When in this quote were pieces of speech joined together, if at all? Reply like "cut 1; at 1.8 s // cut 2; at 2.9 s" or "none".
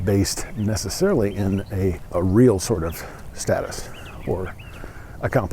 cut 1; at 2.0 s